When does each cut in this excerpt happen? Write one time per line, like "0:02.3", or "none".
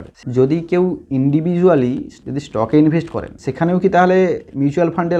none